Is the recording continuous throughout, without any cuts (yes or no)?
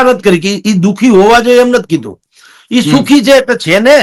yes